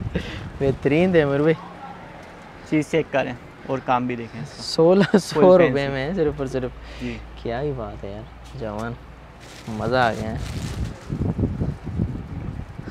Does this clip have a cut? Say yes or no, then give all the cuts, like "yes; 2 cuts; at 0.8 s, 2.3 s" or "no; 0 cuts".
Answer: no; 0 cuts